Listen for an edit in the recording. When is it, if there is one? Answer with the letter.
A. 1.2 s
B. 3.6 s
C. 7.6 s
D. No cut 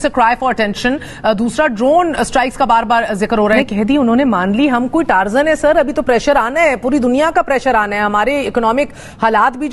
B